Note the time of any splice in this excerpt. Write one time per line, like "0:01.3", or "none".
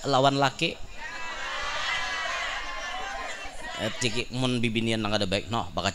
0:04.2